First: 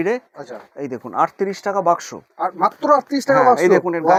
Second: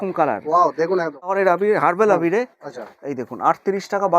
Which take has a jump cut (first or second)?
second